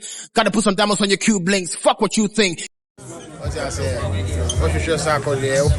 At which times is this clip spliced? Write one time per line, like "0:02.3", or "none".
0:02.6